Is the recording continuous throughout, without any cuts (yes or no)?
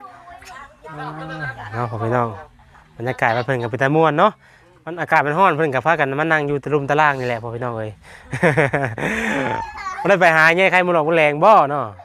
yes